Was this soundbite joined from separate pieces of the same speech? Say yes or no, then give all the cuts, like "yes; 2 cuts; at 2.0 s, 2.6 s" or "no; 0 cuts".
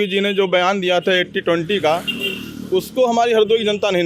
no; 0 cuts